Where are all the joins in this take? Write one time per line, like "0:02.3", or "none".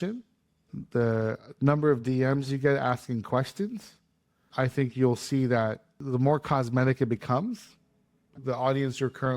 0:05.9
0:08.3